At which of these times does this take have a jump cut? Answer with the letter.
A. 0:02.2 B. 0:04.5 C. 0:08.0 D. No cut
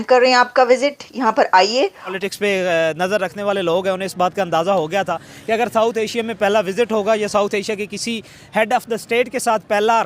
A